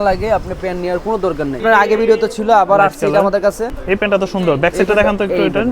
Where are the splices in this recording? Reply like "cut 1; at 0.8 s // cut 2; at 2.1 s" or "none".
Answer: cut 1; at 1.6 s // cut 2; at 3.8 s